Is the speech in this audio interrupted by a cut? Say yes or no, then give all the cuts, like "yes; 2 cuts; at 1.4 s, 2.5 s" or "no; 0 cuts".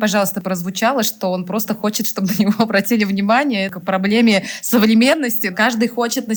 no; 0 cuts